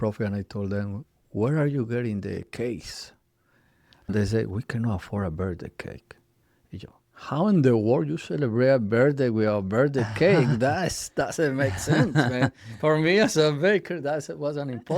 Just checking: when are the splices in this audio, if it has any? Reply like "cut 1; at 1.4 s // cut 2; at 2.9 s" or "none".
cut 1; at 1.1 s // cut 2; at 4.1 s